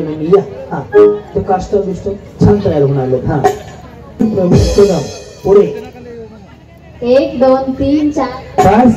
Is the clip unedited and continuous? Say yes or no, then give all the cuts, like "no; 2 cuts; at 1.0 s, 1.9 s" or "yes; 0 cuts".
no; 1 cut; at 4.2 s